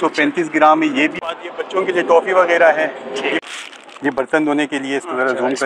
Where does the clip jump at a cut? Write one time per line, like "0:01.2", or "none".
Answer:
0:01.2
0:03.4